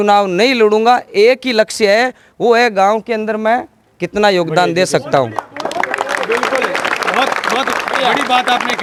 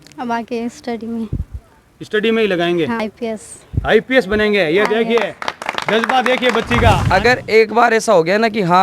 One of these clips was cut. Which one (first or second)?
second